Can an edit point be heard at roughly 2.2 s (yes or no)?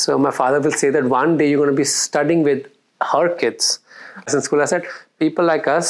no